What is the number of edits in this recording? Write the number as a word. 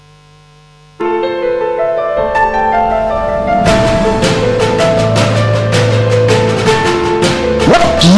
one